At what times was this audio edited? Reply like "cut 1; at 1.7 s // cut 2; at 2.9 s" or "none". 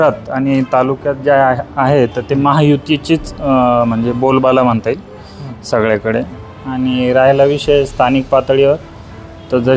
none